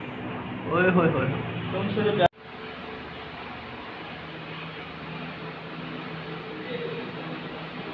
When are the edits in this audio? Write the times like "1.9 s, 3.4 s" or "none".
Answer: none